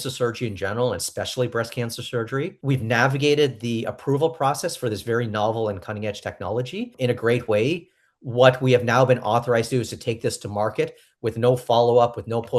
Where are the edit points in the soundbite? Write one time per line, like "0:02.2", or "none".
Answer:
0:02.6
0:06.9

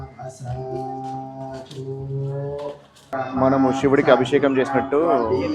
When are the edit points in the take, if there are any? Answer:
0:03.1

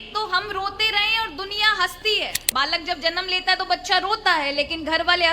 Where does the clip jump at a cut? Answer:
0:02.4

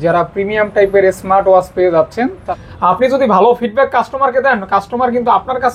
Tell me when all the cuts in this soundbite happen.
0:02.4

